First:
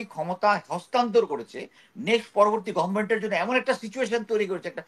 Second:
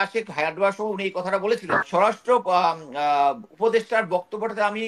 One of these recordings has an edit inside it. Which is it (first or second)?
second